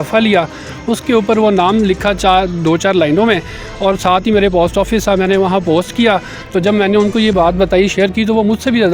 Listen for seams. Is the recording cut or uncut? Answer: cut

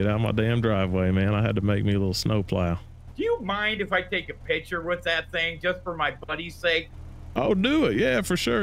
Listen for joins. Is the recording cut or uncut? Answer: cut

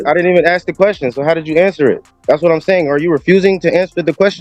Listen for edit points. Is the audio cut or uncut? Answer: uncut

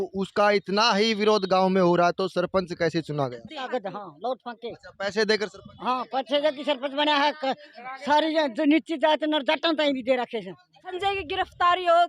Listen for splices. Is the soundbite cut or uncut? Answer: cut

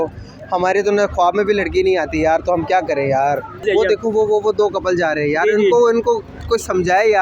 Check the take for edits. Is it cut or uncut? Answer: cut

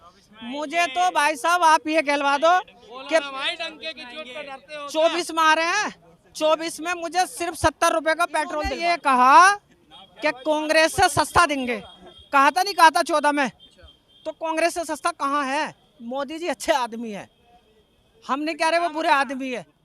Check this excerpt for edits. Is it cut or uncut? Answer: cut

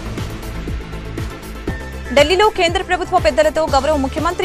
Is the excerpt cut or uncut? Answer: cut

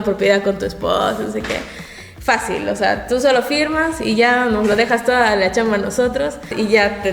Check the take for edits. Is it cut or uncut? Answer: uncut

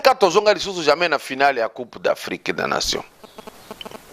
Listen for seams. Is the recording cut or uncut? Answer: uncut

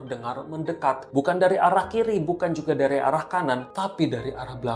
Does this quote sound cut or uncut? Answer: cut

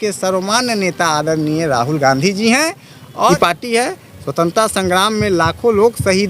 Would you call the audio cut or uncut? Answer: cut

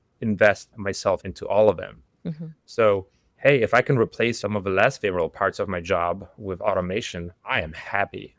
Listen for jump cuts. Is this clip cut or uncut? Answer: cut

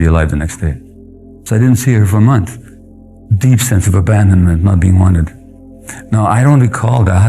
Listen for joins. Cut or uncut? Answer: cut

